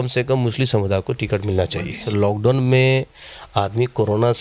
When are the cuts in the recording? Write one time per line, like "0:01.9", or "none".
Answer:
0:02.0